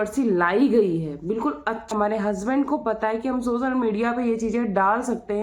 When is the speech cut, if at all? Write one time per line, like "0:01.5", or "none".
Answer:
0:01.9